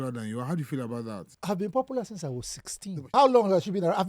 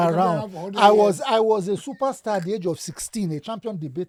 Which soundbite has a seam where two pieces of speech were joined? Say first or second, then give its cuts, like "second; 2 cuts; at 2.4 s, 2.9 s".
first; 2 cuts; at 1.3 s, 3.1 s